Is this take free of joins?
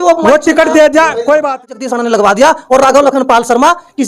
no; 1 cut; at 1.8 s

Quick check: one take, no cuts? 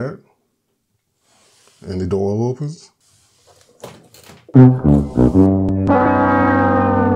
no; 1 cut; at 4.5 s

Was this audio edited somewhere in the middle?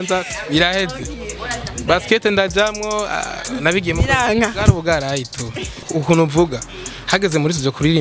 yes; 1 cut; at 5.8 s

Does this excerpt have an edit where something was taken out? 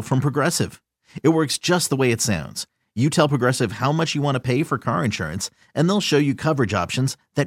no; 0 cuts

